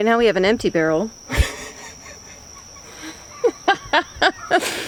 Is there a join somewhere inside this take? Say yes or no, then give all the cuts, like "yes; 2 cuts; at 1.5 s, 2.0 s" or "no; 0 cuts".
no; 0 cuts